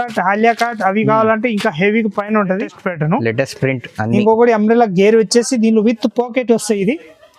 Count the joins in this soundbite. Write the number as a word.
one